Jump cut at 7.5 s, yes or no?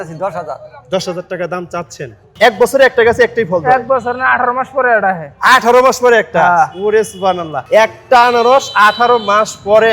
yes